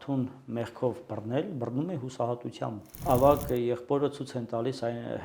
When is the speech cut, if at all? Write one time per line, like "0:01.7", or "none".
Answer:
0:02.9